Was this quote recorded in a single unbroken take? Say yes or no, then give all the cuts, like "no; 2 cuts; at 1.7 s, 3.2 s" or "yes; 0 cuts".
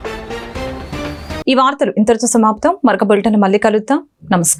yes; 0 cuts